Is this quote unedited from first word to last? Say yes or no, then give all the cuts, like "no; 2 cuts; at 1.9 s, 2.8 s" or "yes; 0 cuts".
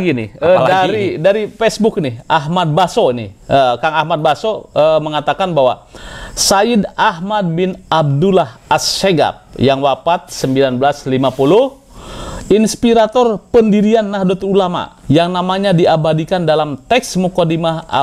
yes; 0 cuts